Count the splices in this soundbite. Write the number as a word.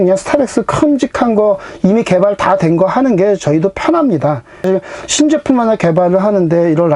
one